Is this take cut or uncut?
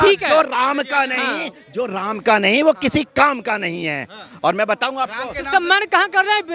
uncut